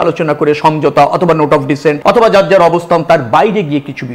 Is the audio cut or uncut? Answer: cut